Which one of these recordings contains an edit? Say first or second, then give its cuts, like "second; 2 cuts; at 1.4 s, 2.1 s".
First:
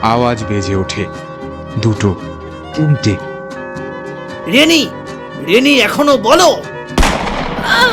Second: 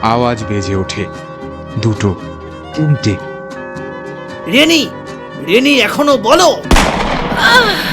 second; 1 cut; at 6.6 s